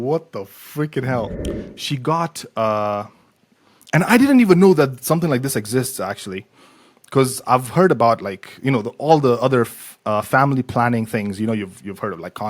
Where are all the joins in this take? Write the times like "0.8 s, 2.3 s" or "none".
1.4 s